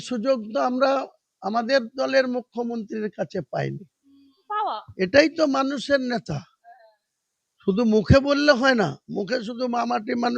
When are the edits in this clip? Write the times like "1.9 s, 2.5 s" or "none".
4.4 s